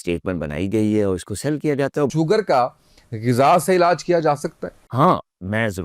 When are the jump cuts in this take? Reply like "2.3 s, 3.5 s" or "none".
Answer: 2.1 s, 4.8 s